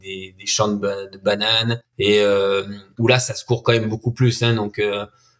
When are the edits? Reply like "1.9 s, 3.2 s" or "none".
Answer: 1.8 s, 2.8 s